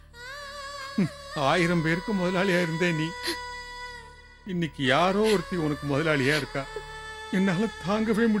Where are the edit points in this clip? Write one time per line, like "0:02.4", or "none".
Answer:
none